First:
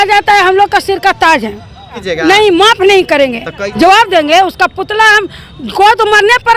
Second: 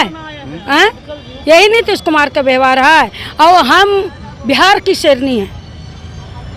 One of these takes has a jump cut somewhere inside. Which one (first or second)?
first